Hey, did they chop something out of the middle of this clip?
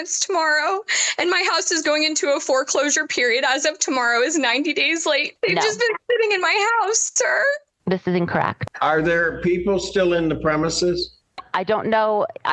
yes; 2 cuts; at 5.3 s, 8.6 s

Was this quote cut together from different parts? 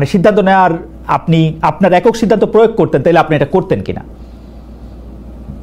no; 0 cuts

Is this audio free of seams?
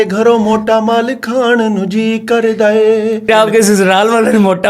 no; 1 cut; at 3.3 s

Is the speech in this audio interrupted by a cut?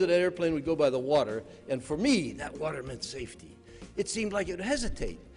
no; 0 cuts

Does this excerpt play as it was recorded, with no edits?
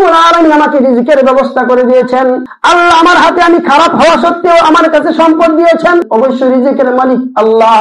no; 2 cuts; at 2.5 s, 6.1 s

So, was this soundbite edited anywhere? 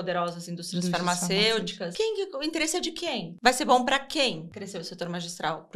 yes; 3 cuts; at 1.8 s, 3.3 s, 4.5 s

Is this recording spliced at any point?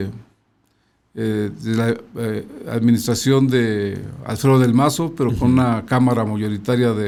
no; 0 cuts

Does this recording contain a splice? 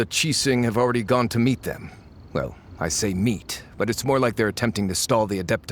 no; 0 cuts

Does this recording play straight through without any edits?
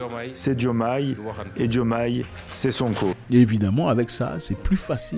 yes; 0 cuts

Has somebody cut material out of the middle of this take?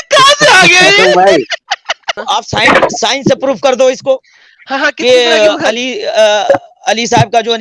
yes; 1 cut; at 2.2 s

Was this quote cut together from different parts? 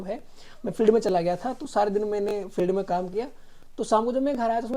no; 0 cuts

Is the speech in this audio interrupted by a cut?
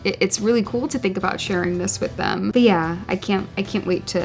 yes; 1 cut; at 2.5 s

